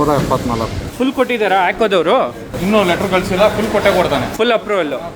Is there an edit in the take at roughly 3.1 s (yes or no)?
no